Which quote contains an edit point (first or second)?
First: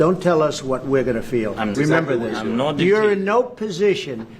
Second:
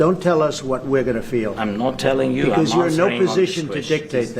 first